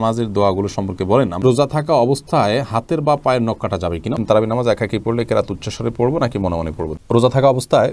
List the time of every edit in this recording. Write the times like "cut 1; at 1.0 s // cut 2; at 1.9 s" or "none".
cut 1; at 1.4 s // cut 2; at 4.2 s // cut 3; at 6.9 s